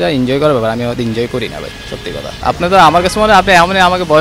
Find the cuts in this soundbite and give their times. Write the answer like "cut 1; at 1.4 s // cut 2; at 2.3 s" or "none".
cut 1; at 2.4 s